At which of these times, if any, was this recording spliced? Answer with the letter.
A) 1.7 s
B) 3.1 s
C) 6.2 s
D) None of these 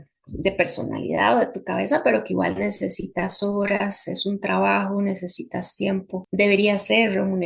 C